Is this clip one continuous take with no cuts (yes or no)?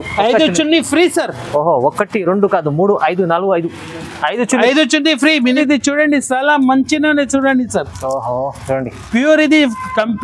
no